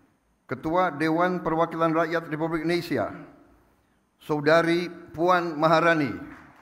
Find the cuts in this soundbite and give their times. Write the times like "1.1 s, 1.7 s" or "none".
none